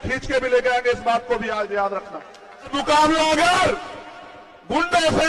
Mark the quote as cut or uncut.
cut